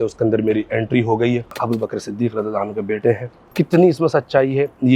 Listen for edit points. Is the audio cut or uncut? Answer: cut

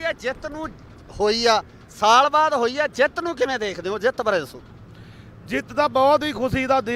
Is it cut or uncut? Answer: cut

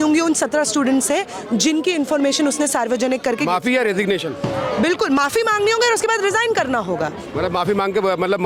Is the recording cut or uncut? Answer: uncut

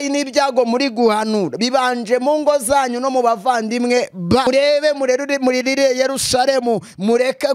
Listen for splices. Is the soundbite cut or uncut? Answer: cut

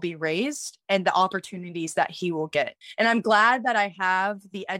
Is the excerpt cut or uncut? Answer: cut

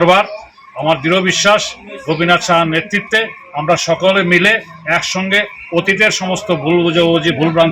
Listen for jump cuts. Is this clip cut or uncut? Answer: cut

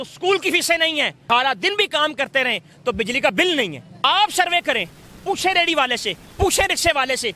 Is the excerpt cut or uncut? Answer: cut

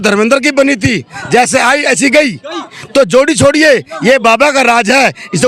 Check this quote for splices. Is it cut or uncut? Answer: uncut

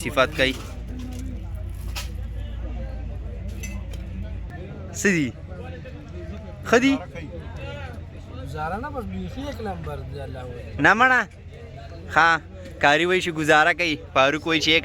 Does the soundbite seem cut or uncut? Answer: cut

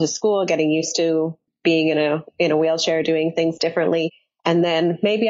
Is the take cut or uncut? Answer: cut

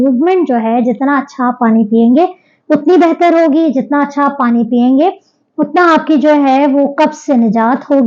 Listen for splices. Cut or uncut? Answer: uncut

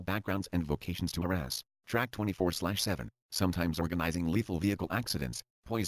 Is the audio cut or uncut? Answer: cut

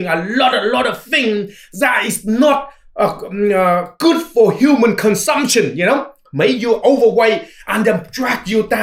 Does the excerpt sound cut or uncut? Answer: uncut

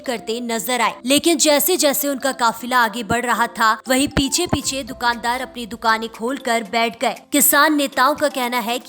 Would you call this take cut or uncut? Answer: cut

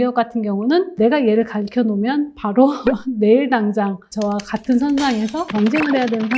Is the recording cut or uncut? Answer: cut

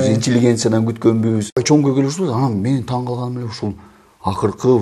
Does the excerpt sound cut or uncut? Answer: cut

